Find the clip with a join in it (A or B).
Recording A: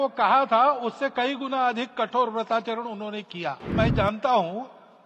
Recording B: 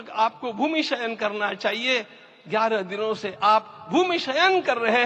A